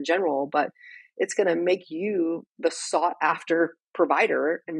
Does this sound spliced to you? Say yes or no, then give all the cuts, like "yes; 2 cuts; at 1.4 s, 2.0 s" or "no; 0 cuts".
no; 0 cuts